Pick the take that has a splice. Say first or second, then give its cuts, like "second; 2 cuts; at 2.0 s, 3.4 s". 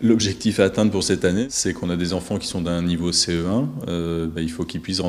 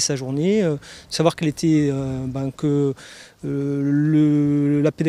first; 1 cut; at 2.1 s